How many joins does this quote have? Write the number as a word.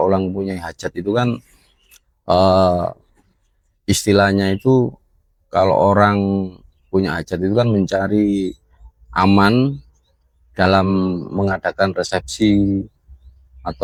zero